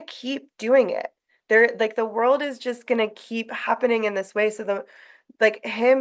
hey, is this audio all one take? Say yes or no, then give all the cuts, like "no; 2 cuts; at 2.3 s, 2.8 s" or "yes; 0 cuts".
yes; 0 cuts